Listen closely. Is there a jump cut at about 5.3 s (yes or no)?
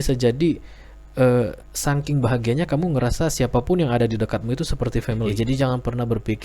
yes